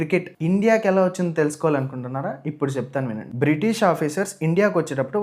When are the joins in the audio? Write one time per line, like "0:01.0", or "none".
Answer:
0:03.2